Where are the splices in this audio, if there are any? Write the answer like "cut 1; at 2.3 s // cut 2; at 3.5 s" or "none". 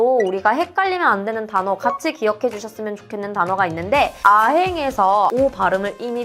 cut 1; at 4.2 s // cut 2; at 5.3 s

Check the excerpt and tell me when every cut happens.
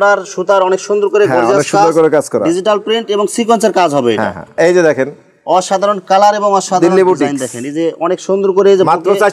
cut 1; at 4.4 s

